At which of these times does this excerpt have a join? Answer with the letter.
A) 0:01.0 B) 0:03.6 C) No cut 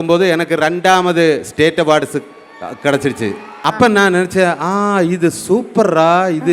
B